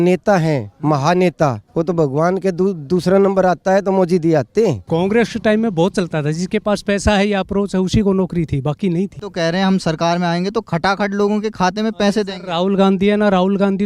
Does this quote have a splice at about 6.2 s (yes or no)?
no